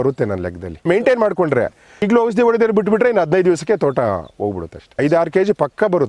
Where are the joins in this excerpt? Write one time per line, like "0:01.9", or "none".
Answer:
0:00.8
0:02.1
0:05.0

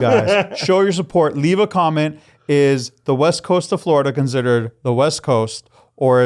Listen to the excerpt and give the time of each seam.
none

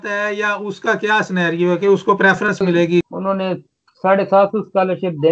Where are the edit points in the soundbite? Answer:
0:03.0

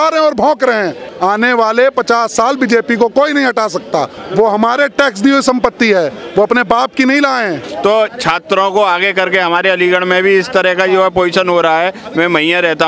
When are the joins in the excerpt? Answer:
0:01.0
0:04.2
0:07.6

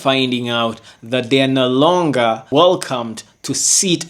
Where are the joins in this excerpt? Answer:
0:02.4

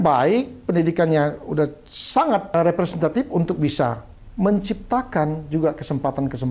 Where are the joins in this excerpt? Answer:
0:02.5

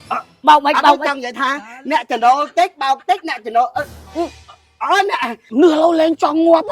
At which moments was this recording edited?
0:05.4

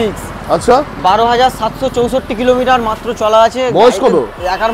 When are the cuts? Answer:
none

